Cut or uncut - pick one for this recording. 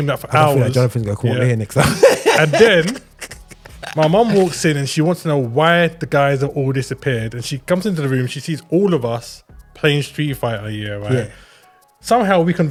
uncut